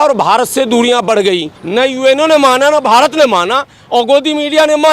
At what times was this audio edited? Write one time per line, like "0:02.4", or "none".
0:01.5